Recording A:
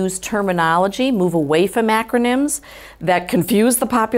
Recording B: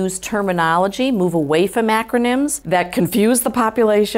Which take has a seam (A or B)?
B